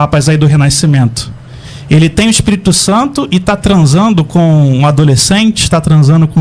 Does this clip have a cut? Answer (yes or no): no